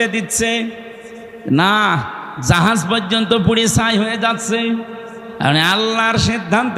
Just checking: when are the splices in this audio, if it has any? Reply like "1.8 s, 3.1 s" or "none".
5.2 s